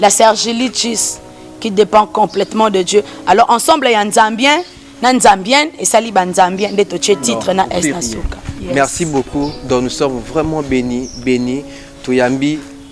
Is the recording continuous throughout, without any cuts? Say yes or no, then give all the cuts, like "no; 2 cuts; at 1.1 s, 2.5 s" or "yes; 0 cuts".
yes; 0 cuts